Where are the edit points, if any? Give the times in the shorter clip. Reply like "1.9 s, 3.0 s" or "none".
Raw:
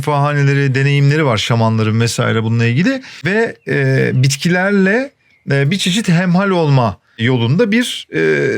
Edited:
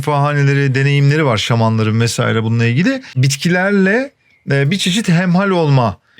3.2 s